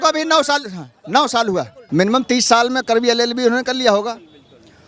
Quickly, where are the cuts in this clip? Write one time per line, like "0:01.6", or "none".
0:01.8